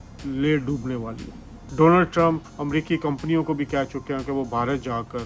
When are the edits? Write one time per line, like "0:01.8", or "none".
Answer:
0:01.7